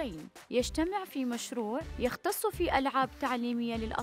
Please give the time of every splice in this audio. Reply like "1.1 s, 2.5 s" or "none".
none